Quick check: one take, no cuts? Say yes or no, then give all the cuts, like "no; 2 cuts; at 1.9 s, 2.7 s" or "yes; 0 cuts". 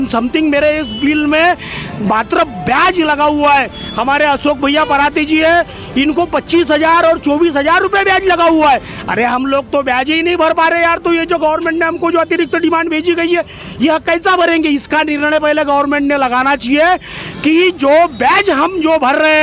yes; 0 cuts